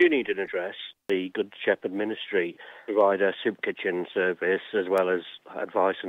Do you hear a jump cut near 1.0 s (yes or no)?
yes